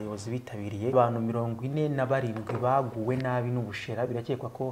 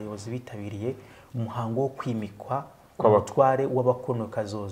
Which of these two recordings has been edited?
first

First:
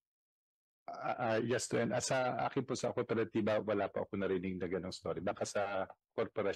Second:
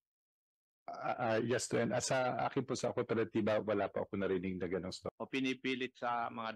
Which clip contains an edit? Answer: second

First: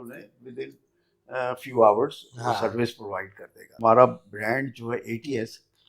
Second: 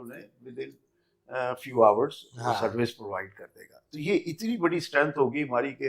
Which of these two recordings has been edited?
first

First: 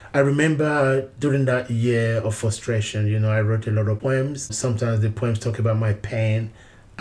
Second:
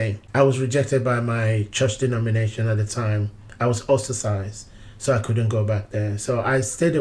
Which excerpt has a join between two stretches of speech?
first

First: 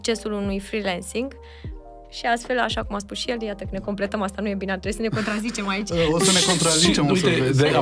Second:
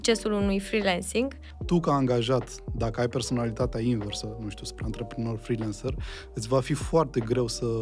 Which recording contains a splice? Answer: second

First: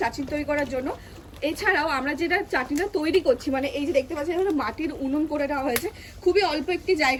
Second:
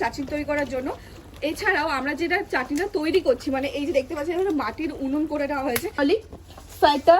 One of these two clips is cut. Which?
second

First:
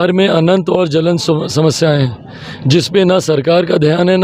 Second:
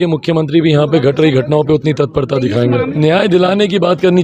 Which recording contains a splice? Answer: second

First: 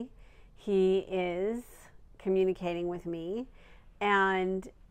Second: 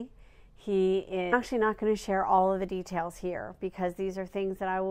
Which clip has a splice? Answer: first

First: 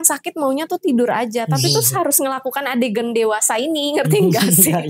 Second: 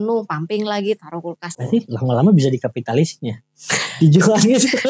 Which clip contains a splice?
second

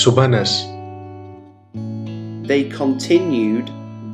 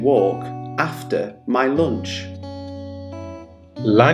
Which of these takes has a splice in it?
first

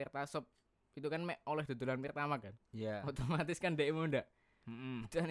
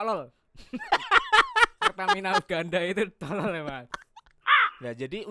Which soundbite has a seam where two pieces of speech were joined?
second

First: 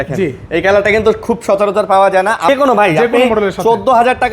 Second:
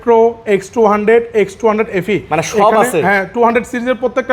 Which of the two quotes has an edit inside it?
first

